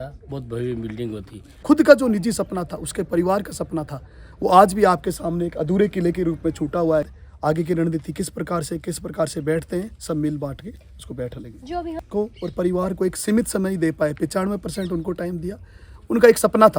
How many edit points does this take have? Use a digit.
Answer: 3